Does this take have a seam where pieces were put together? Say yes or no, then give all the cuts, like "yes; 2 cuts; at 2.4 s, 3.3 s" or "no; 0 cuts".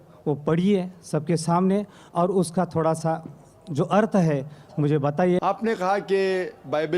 yes; 1 cut; at 5.4 s